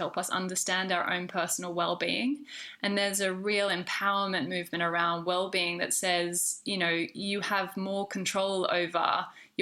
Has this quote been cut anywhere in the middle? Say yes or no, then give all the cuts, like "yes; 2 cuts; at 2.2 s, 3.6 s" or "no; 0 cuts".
no; 0 cuts